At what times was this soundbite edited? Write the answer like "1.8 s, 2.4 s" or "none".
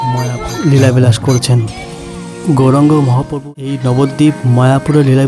3.3 s